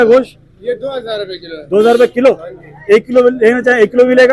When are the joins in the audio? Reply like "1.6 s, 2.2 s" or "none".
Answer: none